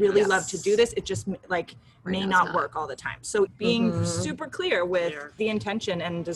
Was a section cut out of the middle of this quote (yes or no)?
yes